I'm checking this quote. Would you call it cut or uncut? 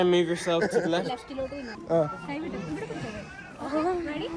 cut